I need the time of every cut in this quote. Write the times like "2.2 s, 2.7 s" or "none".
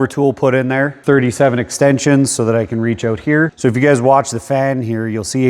1.0 s, 3.5 s